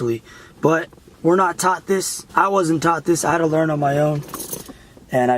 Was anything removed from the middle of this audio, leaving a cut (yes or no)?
yes